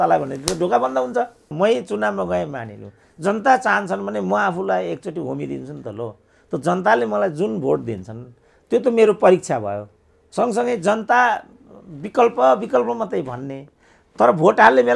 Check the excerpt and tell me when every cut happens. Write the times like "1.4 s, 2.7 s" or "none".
1.5 s